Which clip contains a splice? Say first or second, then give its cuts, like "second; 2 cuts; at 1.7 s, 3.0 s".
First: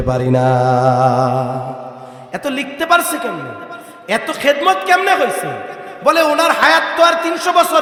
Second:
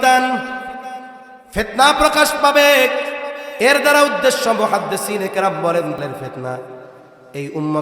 second; 1 cut; at 6.0 s